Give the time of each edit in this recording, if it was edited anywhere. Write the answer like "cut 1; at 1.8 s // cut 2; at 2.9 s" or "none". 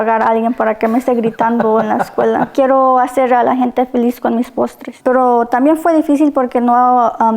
cut 1; at 2.5 s // cut 2; at 4.9 s